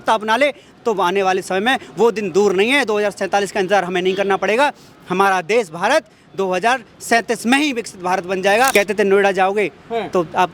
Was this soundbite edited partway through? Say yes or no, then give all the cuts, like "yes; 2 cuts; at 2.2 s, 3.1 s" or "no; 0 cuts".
yes; 1 cut; at 8.7 s